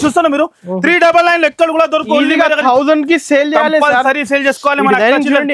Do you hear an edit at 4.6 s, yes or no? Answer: no